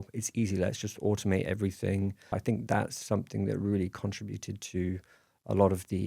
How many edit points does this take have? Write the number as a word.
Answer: one